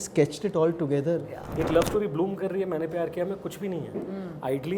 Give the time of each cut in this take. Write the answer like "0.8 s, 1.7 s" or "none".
1.4 s